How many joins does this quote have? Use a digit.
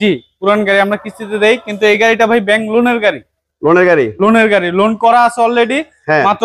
0